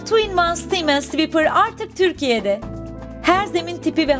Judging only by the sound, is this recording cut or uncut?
uncut